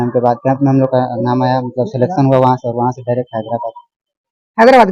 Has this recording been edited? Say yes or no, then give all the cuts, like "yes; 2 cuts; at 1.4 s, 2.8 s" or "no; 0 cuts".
no; 0 cuts